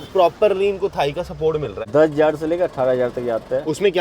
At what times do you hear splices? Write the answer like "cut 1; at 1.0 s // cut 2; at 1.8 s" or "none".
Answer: cut 1; at 1.8 s